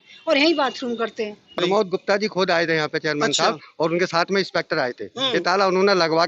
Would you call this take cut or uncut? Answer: cut